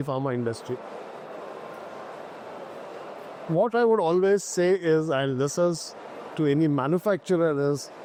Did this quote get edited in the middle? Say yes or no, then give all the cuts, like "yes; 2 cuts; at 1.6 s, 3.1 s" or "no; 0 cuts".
no; 0 cuts